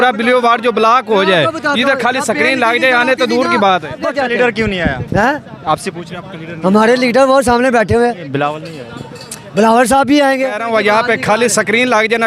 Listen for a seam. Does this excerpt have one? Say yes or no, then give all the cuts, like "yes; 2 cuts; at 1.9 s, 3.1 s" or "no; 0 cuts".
yes; 2 cuts; at 4.1 s, 10.6 s